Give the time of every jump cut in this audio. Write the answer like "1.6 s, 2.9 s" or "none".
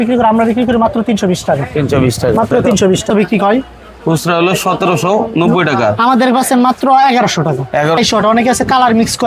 3.1 s, 8.0 s